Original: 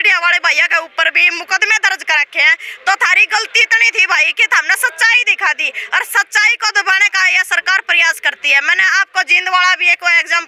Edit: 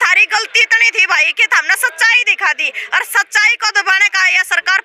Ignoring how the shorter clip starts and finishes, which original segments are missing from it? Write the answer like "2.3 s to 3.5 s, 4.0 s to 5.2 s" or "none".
none